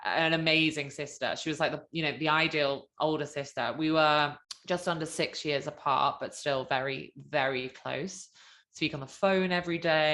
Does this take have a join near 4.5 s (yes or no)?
yes